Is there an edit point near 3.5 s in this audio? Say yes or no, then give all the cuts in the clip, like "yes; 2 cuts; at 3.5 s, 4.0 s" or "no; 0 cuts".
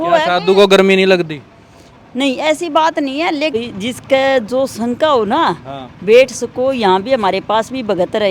yes; 1 cut; at 3.5 s